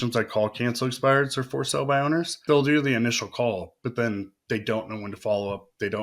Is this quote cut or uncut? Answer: cut